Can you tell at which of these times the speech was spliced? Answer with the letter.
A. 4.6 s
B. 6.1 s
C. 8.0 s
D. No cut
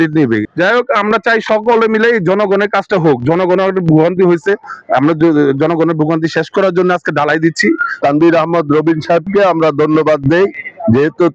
C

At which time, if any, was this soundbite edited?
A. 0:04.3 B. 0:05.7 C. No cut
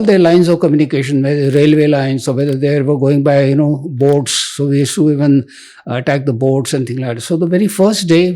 C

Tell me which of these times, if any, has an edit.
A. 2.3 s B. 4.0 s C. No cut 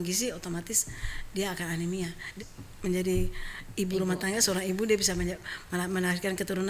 A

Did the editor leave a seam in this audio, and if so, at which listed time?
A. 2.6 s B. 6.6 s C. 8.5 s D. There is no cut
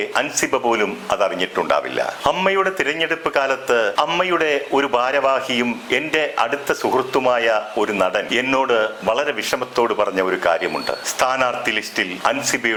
D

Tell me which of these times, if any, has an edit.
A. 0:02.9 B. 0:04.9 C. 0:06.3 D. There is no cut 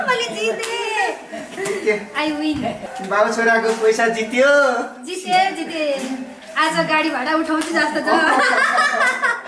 A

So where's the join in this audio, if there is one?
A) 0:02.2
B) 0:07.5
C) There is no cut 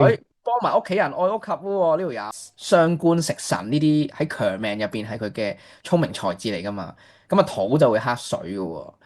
A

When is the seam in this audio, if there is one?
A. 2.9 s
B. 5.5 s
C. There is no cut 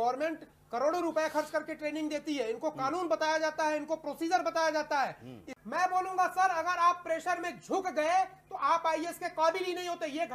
B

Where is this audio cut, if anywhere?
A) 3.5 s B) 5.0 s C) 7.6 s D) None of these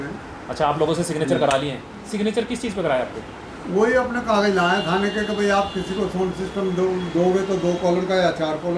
D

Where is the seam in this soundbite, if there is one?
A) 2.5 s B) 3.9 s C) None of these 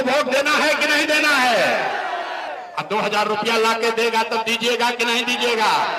A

